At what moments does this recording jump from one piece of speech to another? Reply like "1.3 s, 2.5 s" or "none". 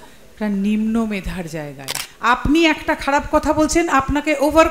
2.1 s

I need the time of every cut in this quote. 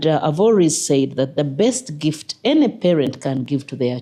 none

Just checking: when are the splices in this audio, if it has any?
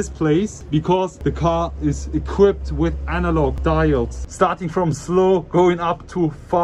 4.2 s

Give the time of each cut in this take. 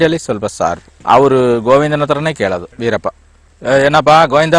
1.0 s

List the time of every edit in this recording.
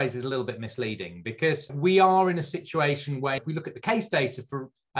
none

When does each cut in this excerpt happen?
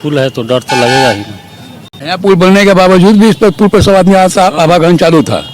2.0 s

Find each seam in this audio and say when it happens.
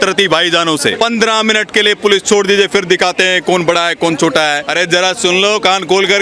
0.9 s, 4.6 s

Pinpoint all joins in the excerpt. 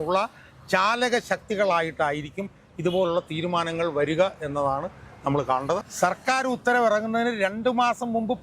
5.8 s

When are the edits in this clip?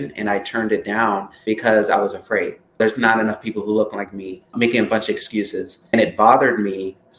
1.3 s, 2.8 s, 4.5 s, 5.9 s

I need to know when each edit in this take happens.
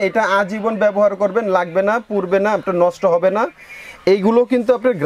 none

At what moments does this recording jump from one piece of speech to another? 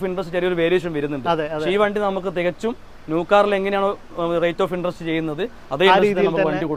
none

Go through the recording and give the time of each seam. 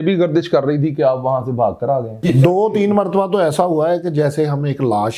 2.1 s

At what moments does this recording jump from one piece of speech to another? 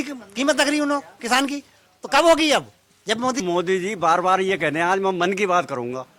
3.4 s

